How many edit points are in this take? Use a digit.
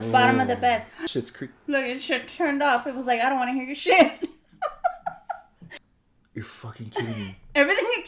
0